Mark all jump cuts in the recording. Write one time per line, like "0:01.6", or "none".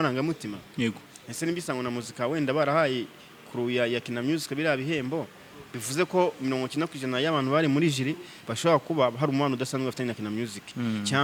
none

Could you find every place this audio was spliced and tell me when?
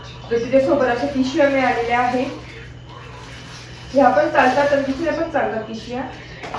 none

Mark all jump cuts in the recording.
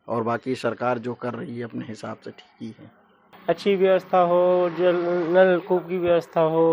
0:03.3

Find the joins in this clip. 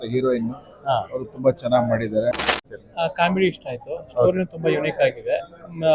0:02.6

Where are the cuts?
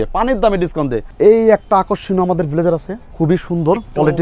0:01.1
0:03.0

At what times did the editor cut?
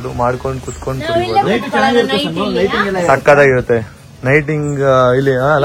none

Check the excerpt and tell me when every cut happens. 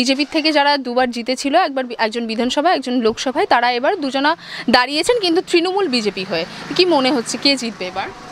none

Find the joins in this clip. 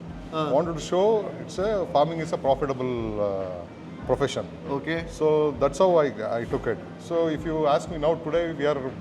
none

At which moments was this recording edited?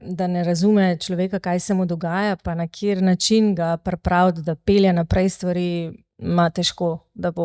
none

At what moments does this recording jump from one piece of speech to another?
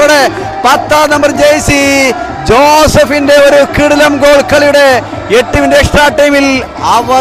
none

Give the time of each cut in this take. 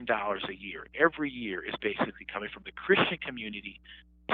none

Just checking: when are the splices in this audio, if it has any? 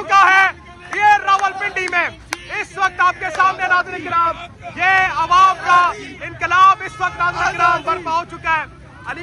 none

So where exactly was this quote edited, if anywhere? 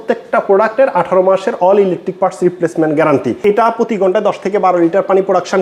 0:03.4

